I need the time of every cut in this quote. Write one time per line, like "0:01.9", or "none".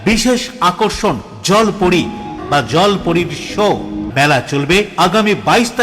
0:02.4
0:04.0

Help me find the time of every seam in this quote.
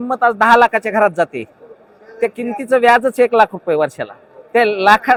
none

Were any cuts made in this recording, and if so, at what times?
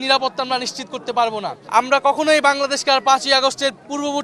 0:01.6

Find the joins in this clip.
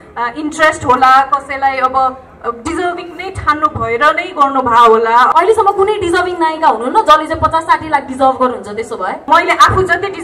0:05.3
0:09.3

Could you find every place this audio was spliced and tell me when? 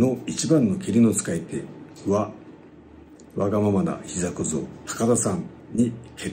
none

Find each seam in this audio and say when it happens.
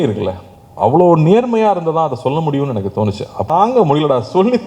0:03.5

